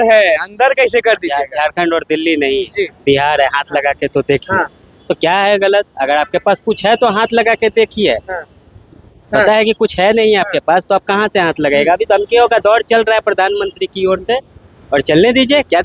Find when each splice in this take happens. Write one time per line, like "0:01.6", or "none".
none